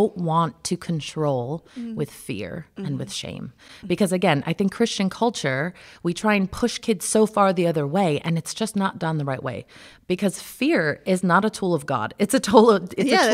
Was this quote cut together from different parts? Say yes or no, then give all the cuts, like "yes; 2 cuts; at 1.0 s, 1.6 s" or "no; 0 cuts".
no; 0 cuts